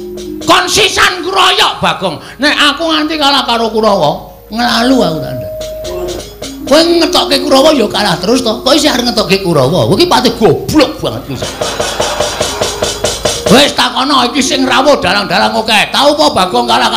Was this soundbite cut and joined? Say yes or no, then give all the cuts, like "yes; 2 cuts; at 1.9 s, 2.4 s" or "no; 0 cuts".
yes; 1 cut; at 6.3 s